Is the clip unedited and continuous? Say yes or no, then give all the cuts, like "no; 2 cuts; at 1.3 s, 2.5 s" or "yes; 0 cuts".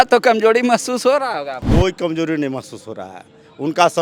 no; 1 cut; at 1.6 s